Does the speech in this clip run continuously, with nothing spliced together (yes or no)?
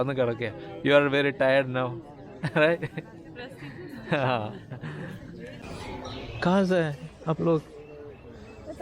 no